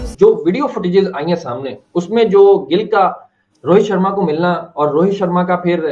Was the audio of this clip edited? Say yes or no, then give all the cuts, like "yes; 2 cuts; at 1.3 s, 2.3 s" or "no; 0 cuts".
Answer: no; 0 cuts